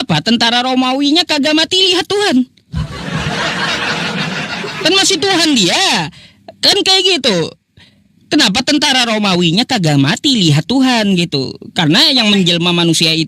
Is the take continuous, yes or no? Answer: yes